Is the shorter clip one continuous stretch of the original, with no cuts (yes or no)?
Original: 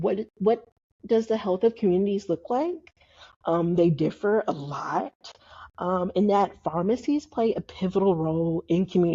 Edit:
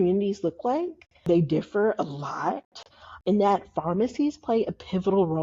no